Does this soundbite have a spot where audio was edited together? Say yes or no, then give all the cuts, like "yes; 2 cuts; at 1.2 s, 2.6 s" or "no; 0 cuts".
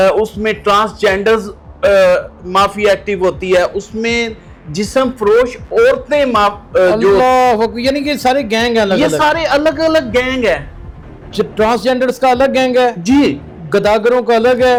no; 0 cuts